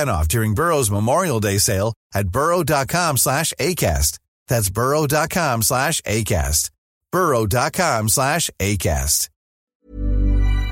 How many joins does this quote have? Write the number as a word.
one